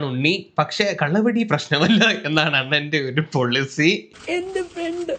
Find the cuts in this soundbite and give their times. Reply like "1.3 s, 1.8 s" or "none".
4.1 s